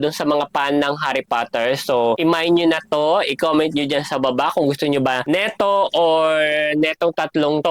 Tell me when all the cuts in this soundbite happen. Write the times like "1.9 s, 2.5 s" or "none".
none